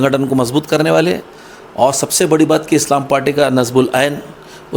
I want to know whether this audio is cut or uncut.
uncut